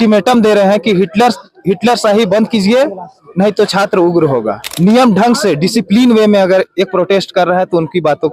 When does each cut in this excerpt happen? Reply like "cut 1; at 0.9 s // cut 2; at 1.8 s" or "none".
cut 1; at 4.6 s